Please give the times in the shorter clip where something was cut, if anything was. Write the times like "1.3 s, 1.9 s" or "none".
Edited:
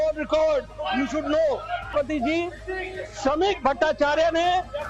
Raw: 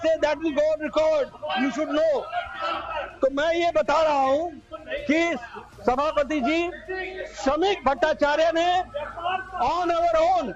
1.9 s